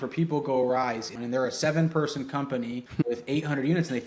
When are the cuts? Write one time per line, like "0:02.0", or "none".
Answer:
0:01.1
0:02.8